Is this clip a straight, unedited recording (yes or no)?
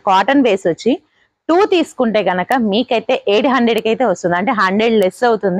yes